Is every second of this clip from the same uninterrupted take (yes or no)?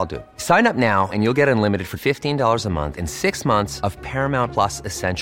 yes